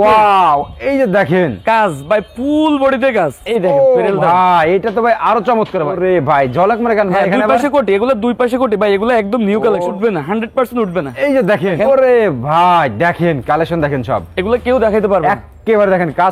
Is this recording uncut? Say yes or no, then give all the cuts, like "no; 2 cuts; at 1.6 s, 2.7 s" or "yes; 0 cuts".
no; 4 cuts; at 3.4 s, 5.9 s, 9.9 s, 11.8 s